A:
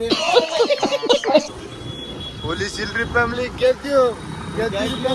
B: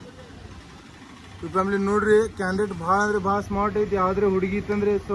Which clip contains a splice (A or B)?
A